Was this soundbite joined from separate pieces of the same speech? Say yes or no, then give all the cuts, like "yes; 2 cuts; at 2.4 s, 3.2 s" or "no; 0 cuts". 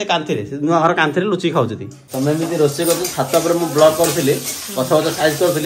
yes; 1 cut; at 2.0 s